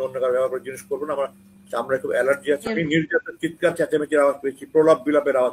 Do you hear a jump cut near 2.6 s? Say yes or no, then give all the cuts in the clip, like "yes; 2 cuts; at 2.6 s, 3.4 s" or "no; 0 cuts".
yes; 1 cut; at 2.6 s